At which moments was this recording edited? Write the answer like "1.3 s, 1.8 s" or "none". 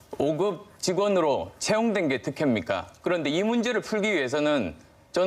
1.2 s